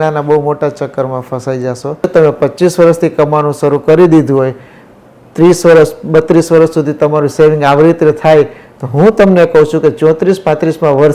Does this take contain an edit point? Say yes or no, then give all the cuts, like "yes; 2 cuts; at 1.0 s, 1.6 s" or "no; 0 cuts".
yes; 1 cut; at 2.1 s